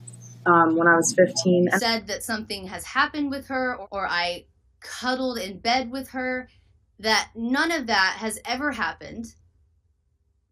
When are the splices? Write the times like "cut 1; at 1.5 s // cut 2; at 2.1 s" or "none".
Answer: cut 1; at 1.7 s // cut 2; at 3.8 s